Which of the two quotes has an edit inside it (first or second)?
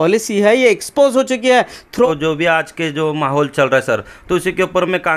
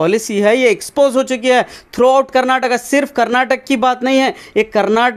first